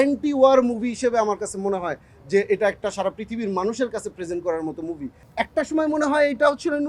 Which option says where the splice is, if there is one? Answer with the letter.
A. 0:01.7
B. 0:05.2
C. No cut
B